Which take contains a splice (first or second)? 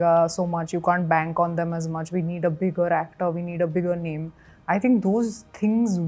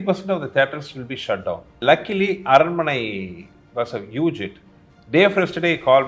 second